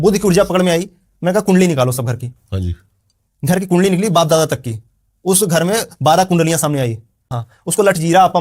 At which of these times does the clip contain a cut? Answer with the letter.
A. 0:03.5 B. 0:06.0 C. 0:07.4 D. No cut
C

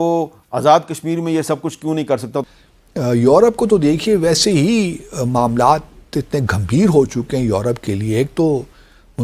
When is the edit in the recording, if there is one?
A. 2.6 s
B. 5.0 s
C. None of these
A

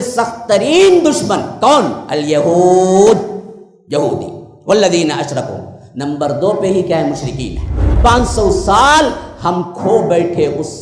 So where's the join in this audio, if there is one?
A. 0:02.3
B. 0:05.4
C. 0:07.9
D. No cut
C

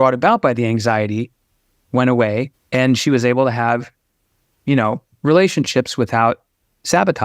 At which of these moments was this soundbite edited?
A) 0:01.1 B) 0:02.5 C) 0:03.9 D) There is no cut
B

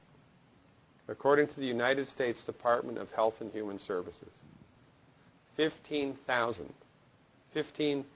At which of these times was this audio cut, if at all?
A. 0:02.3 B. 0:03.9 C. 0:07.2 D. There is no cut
D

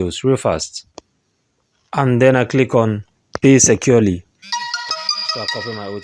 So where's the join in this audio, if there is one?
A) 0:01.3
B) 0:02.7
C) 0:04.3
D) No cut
C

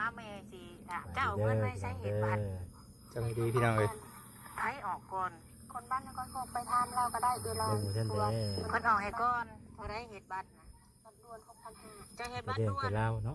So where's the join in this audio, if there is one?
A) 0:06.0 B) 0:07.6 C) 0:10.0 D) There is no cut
D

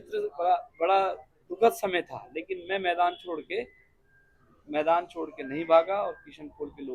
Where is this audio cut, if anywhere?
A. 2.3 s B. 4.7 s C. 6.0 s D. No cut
D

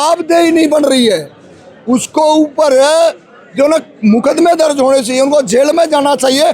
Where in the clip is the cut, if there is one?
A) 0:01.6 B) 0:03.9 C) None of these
C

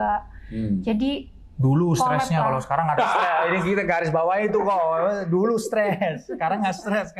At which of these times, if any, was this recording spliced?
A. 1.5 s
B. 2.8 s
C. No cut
C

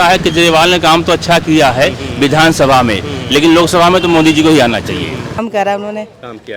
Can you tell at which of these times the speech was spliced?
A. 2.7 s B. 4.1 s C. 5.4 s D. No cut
C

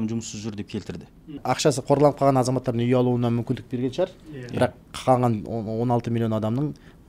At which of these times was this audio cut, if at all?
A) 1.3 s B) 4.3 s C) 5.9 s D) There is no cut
A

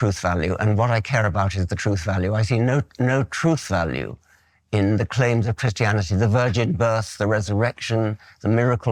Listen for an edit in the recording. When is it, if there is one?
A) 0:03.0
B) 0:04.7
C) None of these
C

